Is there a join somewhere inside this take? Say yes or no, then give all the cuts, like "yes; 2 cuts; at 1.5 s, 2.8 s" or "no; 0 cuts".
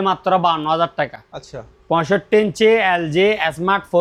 no; 0 cuts